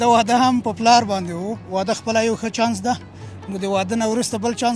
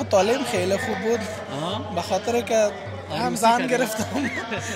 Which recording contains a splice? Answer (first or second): first